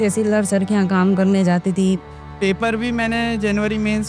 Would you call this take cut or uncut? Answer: cut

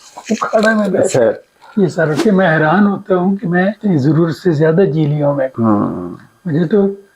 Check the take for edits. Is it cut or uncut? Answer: cut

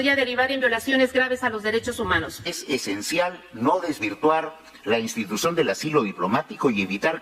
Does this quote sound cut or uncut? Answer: cut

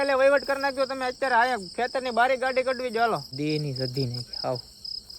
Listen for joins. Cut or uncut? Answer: cut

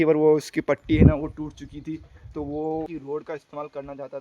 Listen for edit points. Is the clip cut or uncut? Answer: cut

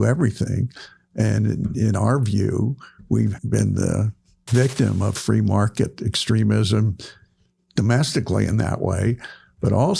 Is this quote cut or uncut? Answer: cut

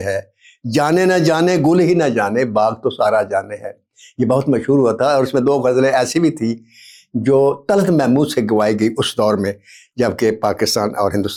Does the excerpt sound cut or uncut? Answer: uncut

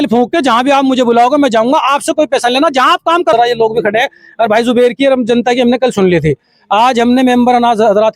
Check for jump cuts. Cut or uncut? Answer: cut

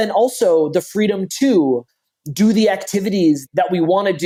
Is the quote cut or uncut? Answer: uncut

